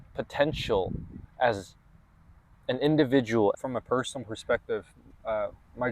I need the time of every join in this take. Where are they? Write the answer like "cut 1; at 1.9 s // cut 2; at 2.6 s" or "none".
cut 1; at 3.5 s

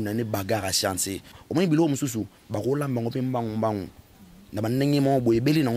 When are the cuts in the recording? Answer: cut 1; at 1.3 s

